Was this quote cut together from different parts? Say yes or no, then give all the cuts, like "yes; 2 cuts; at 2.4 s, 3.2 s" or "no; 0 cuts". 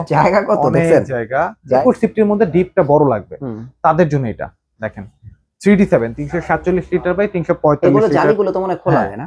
yes; 1 cut; at 1.8 s